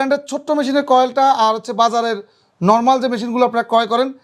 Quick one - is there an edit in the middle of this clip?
no; 0 cuts

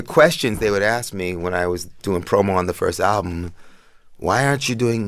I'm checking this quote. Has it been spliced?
no; 0 cuts

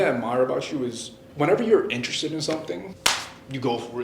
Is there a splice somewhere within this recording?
yes; 2 cuts; at 1.2 s, 2.9 s

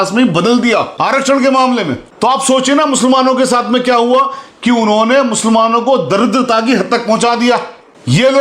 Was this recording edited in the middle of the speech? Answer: yes; 1 cut; at 0.9 s

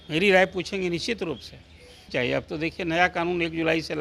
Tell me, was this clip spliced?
yes; 1 cut; at 2.1 s

